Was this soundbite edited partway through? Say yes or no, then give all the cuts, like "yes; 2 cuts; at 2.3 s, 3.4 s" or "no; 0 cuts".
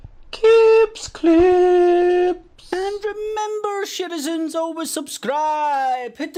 no; 0 cuts